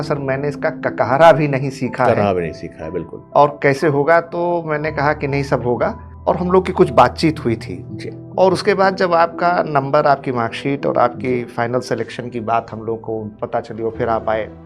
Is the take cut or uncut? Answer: uncut